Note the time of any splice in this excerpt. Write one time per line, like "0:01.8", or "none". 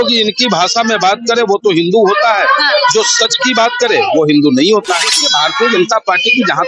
0:05.2